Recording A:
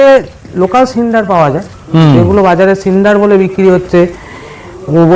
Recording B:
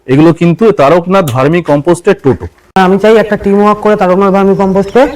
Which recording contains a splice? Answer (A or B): B